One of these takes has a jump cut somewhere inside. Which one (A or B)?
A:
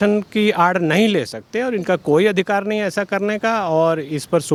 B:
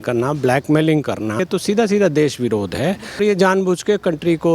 B